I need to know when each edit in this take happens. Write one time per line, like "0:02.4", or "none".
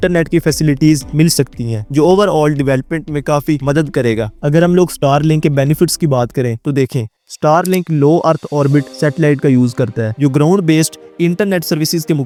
none